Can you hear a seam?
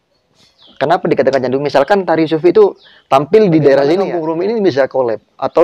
yes; 1 cut; at 4.1 s

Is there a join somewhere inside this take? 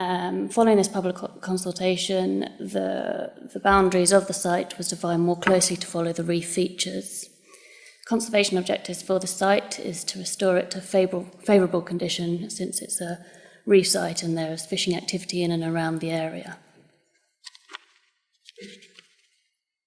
yes; 1 cut; at 2.0 s

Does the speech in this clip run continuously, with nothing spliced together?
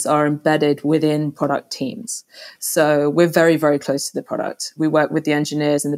no; 1 cut; at 4.7 s

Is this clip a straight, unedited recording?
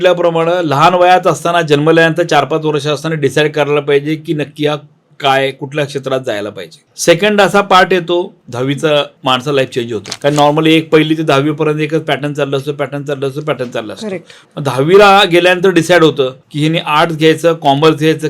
no; 2 cuts; at 6.9 s, 9.1 s

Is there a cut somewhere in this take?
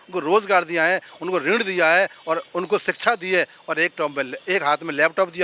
no; 0 cuts

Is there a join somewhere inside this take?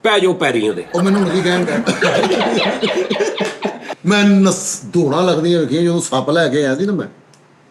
yes; 1 cut; at 3.9 s

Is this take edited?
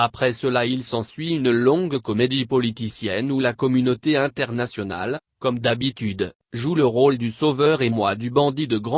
yes; 1 cut; at 1.7 s

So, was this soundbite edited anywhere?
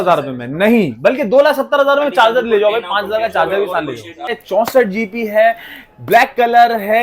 yes; 1 cut; at 4.3 s

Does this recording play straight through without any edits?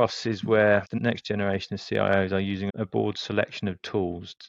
no; 1 cut; at 0.9 s

